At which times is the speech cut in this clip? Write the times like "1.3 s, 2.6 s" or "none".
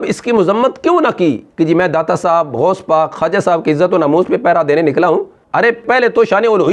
1.5 s

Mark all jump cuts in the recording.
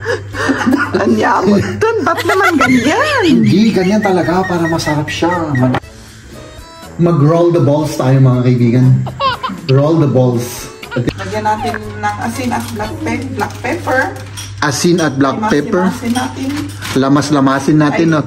5.8 s, 11.1 s

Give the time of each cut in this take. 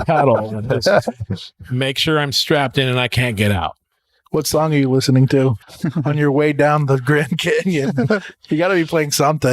5.7 s

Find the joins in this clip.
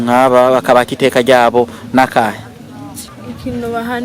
3.1 s

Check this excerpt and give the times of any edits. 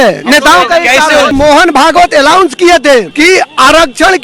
1.3 s, 3.1 s

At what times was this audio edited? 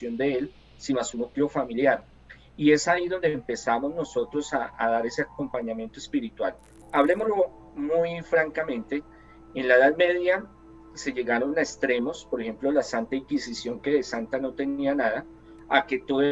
6.8 s

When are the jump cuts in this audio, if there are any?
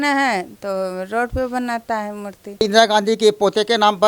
2.4 s

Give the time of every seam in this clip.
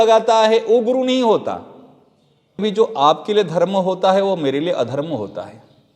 2.6 s

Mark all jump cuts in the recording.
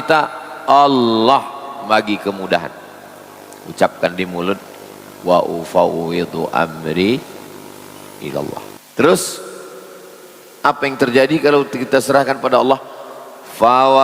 8.8 s

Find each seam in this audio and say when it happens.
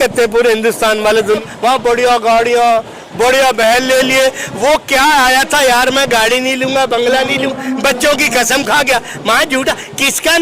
1.4 s

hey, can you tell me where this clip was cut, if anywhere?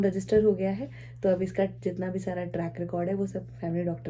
none

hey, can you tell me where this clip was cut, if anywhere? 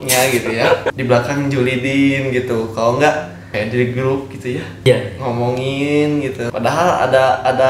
0.8 s, 3.4 s, 4.9 s, 6.5 s

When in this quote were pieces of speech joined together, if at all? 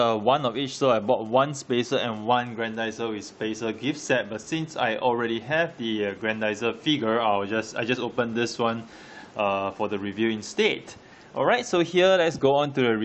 7.6 s

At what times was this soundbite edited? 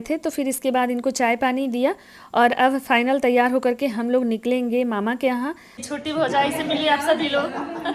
5.8 s

